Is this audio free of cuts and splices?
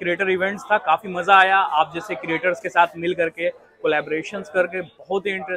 yes; 0 cuts

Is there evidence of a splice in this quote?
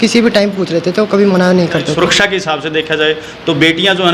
yes; 1 cut; at 1.9 s

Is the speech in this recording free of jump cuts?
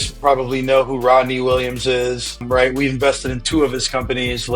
no; 1 cut; at 2.4 s

